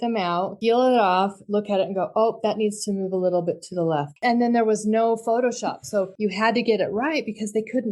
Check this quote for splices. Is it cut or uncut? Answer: cut